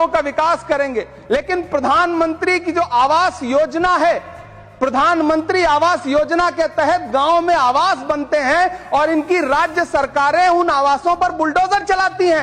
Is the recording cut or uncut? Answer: uncut